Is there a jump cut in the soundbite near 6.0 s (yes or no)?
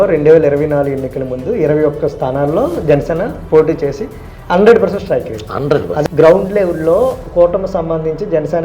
yes